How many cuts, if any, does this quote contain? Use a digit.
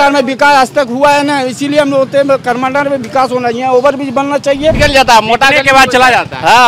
1